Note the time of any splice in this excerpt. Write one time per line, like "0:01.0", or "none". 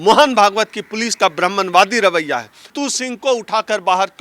0:02.7